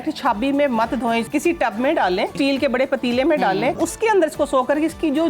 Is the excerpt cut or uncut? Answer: cut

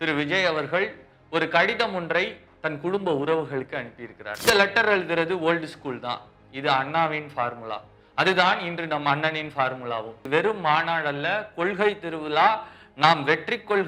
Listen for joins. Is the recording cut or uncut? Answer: cut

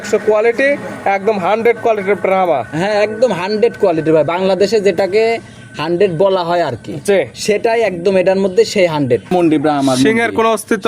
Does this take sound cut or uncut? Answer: cut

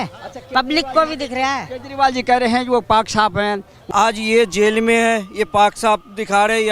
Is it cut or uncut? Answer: cut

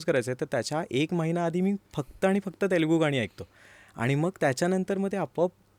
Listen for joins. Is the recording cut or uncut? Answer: uncut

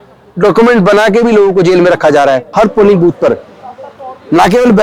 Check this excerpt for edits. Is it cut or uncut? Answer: cut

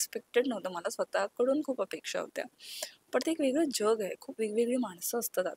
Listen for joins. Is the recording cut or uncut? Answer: uncut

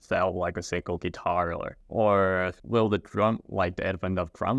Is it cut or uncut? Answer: cut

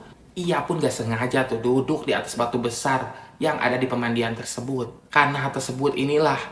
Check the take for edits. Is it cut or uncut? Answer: uncut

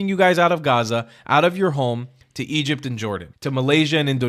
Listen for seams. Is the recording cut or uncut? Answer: cut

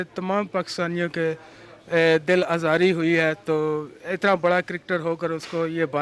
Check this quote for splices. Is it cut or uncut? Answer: uncut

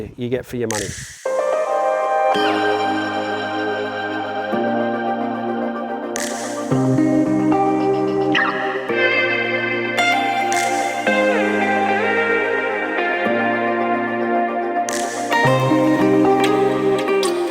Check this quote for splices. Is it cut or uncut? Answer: cut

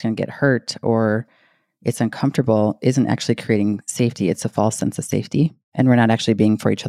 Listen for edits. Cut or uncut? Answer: cut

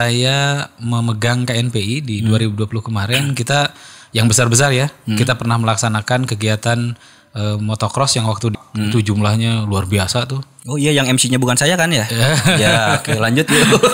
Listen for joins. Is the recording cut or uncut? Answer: cut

